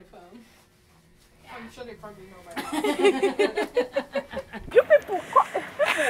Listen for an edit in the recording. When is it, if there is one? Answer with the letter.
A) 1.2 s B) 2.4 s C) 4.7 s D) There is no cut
C